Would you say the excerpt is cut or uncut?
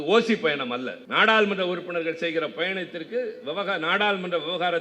cut